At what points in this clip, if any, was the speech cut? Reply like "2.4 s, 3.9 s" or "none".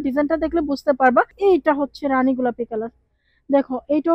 1.3 s